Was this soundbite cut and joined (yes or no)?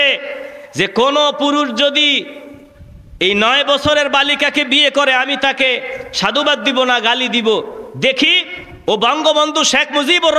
no